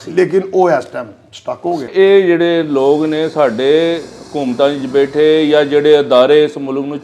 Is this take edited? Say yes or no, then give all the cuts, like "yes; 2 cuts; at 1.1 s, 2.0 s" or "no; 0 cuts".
yes; 1 cut; at 1.9 s